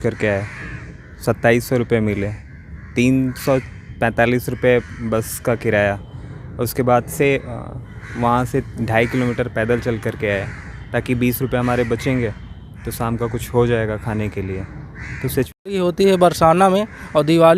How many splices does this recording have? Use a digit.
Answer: 1